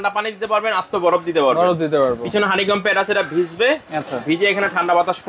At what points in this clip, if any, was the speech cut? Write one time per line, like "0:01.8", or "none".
none